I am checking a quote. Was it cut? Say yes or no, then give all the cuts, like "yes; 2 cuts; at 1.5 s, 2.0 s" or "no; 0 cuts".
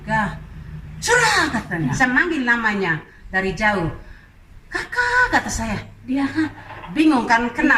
yes; 1 cut; at 1.9 s